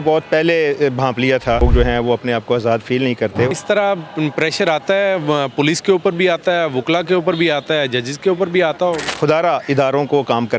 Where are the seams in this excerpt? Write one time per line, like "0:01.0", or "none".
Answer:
0:01.6
0:03.5
0:09.1